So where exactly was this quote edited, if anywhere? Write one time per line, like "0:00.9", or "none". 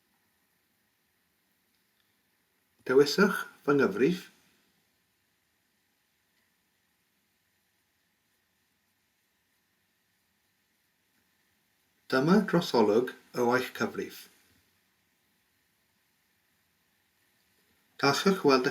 0:11.1
0:17.2